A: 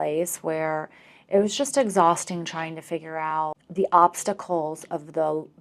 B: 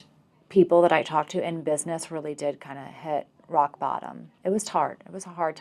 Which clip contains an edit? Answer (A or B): A